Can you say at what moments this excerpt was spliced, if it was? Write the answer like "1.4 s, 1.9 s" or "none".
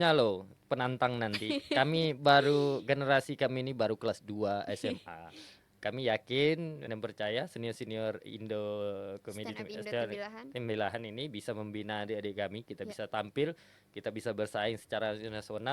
6.9 s